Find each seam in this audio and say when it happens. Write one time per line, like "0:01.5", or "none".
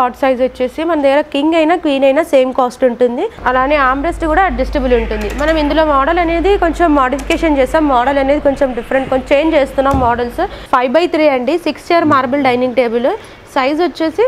0:03.3
0:10.6